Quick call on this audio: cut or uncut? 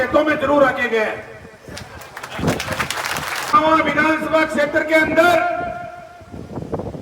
cut